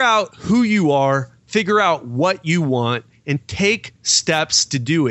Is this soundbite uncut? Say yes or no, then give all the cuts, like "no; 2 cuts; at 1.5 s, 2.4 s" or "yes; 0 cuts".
yes; 0 cuts